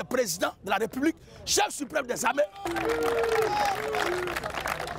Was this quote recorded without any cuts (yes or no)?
yes